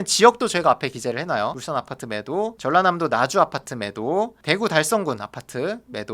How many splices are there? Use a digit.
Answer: 1